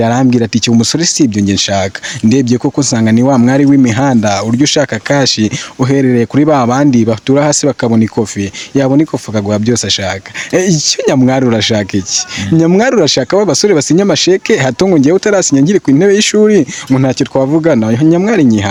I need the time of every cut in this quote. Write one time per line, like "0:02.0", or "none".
none